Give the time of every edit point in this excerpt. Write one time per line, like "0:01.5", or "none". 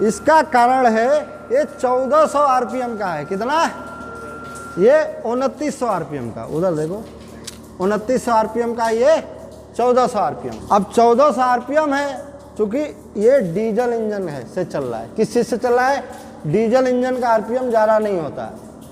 0:10.5